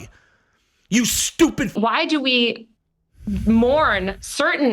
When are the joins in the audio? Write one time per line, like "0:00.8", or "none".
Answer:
0:01.7